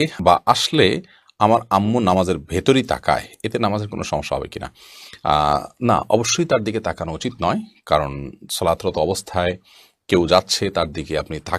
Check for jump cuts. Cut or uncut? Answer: uncut